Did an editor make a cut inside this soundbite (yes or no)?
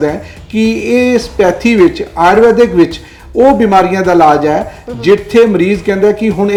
no